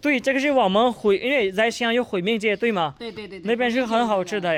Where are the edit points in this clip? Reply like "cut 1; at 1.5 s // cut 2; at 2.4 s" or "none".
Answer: none